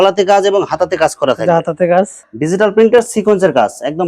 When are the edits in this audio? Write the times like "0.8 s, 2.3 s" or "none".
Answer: 2.2 s